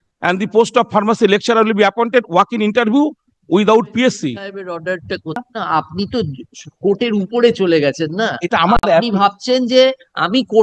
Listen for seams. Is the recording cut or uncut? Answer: cut